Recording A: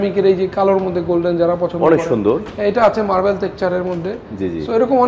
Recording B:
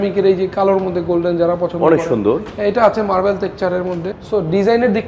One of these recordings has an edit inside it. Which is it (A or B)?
B